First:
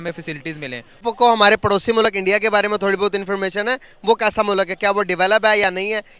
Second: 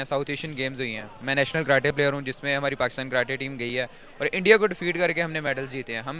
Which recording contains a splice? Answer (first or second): first